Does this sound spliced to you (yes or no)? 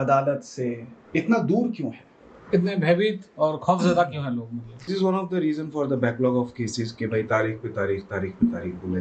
yes